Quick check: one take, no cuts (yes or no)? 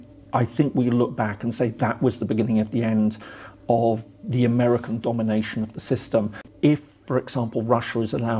no